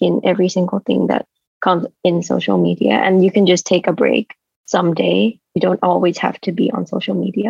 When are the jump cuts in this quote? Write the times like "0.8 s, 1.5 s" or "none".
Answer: none